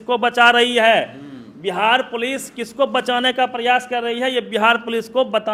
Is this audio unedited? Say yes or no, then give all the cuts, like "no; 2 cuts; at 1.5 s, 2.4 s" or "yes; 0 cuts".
yes; 0 cuts